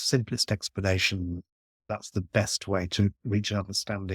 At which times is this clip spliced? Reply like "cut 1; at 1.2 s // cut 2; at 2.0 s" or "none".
cut 1; at 1.8 s // cut 2; at 3.2 s